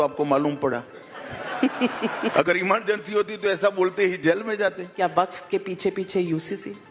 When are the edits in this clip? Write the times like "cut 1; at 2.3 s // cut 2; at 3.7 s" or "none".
cut 1; at 2.3 s // cut 2; at 4.9 s